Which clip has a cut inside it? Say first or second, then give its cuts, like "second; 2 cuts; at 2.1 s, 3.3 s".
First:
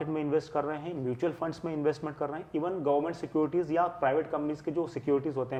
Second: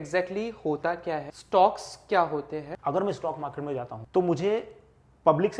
second; 3 cuts; at 1.3 s, 2.7 s, 4.0 s